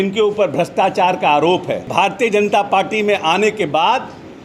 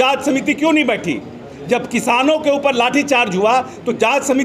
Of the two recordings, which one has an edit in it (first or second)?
first